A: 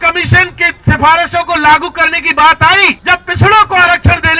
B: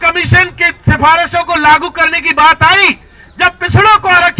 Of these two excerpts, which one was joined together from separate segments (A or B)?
A